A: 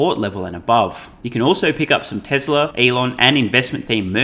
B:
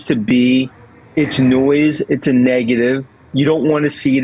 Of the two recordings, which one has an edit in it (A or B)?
A